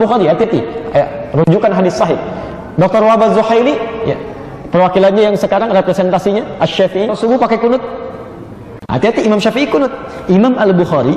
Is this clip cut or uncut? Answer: cut